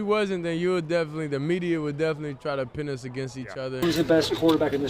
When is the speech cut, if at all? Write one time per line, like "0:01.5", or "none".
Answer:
0:03.8